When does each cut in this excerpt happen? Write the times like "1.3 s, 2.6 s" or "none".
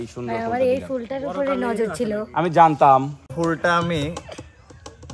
3.3 s